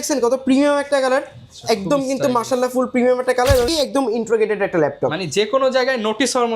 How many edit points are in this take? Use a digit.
1